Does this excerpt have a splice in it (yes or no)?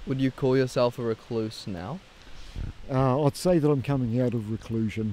no